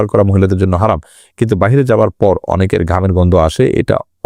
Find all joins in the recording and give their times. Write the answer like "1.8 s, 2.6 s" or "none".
none